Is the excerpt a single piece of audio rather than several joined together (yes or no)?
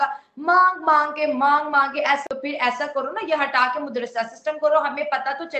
no